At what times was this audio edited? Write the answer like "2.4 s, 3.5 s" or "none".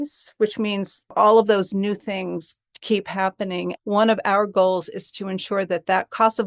3.7 s